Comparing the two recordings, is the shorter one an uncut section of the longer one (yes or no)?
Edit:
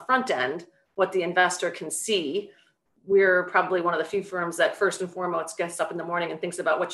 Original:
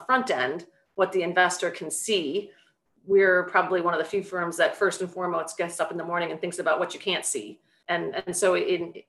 yes